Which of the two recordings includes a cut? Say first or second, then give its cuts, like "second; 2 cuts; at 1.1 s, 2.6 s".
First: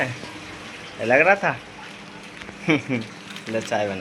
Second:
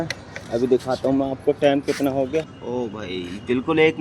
second; 1 cut; at 2.6 s